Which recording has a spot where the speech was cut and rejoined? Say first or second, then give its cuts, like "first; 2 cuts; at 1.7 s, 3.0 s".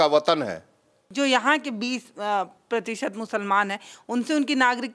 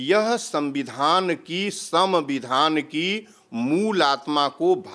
first; 1 cut; at 1.0 s